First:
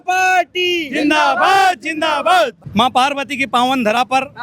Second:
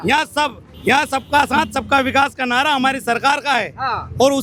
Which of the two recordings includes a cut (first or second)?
first